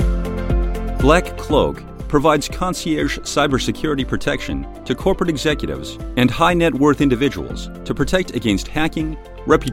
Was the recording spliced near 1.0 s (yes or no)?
yes